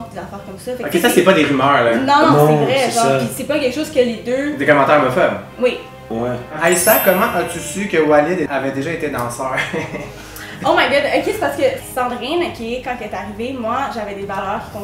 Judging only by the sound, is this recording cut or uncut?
cut